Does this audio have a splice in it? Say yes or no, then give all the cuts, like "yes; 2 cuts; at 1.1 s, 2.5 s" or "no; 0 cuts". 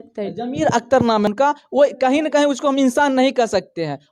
yes; 1 cut; at 1.3 s